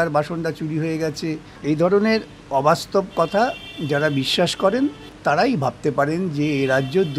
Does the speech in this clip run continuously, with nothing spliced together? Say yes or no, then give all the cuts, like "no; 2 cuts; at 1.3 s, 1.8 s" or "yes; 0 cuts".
no; 2 cuts; at 1.5 s, 5.1 s